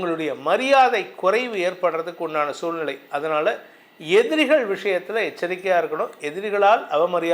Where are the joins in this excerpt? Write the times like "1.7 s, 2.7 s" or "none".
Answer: none